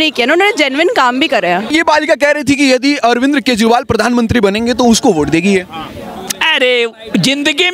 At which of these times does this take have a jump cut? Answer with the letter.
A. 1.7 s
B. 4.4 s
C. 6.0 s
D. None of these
A